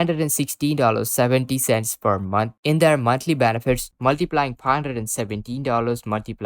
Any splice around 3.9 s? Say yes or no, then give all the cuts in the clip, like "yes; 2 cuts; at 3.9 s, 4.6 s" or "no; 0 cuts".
yes; 1 cut; at 3.9 s